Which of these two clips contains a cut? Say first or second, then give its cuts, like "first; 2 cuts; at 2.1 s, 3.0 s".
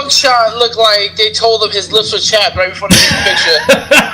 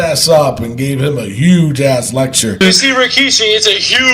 second; 1 cut; at 2.6 s